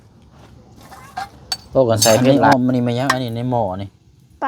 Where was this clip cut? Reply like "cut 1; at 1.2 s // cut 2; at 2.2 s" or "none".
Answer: cut 1; at 2.3 s